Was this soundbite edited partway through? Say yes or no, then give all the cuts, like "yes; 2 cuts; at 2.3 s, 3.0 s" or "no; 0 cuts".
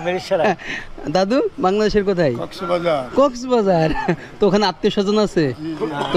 no; 0 cuts